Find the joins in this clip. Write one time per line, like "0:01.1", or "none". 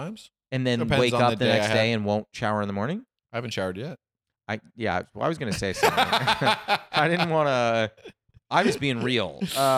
none